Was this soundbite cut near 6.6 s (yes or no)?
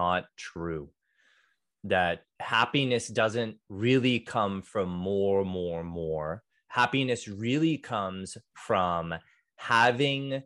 yes